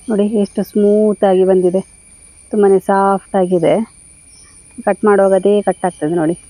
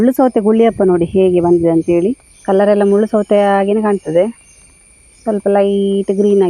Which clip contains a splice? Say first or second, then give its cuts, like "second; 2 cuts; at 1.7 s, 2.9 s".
second; 1 cut; at 2.3 s